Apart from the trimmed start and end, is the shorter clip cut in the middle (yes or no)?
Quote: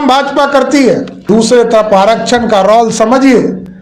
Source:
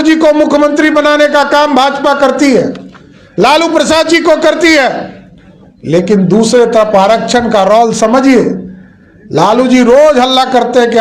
yes